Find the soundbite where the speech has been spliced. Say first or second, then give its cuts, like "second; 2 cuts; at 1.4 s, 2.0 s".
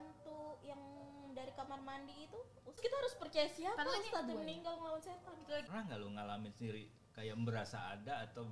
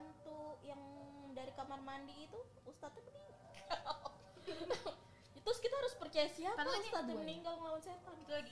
first; 2 cuts; at 2.8 s, 5.7 s